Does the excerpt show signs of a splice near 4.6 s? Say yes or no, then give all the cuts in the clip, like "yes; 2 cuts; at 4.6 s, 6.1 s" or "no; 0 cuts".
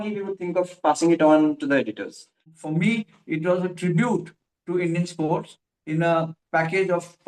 no; 1 cut; at 2.6 s